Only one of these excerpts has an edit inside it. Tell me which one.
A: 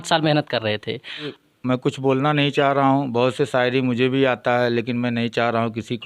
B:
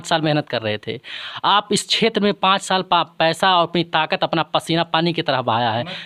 A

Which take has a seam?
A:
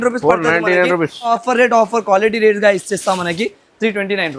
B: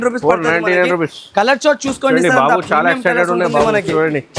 A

